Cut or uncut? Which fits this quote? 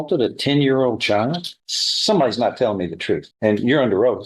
cut